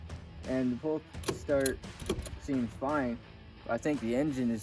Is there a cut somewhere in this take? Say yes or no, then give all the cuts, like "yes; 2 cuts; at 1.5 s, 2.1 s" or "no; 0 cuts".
no; 0 cuts